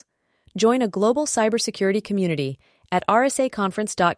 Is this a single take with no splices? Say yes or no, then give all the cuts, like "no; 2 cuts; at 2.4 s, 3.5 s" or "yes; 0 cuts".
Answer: yes; 0 cuts